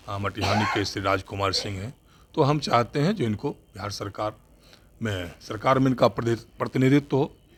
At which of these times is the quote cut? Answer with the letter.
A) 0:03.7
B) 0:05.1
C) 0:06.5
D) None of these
D